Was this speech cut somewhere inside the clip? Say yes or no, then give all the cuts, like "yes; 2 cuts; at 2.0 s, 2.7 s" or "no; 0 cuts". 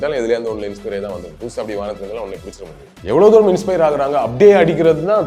yes; 1 cut; at 2.9 s